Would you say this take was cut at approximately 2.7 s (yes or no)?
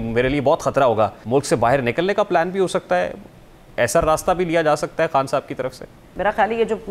no